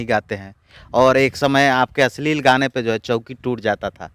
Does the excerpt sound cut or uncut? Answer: uncut